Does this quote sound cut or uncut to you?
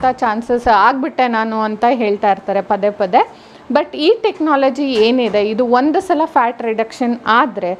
uncut